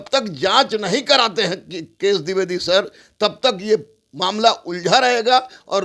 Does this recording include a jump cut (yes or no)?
no